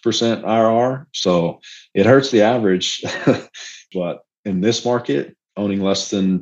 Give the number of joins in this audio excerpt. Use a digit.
1